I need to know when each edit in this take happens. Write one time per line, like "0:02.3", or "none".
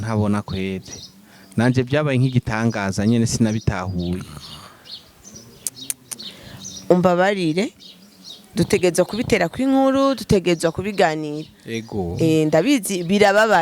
none